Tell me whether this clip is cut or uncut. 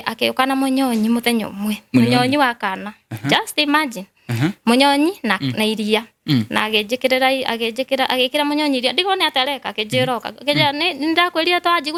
uncut